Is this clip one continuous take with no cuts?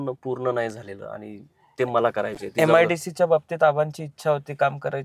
yes; 0 cuts

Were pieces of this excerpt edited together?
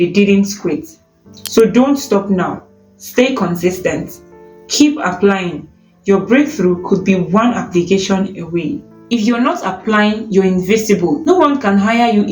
yes; 2 cuts; at 8.9 s, 11.2 s

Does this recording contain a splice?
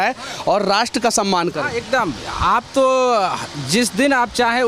no; 0 cuts

